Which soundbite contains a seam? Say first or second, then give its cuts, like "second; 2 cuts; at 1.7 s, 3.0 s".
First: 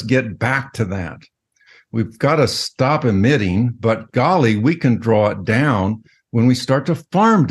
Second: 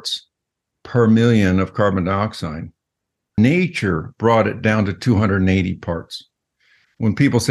second; 1 cut; at 3.4 s